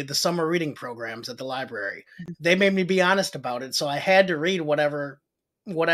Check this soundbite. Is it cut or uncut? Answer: cut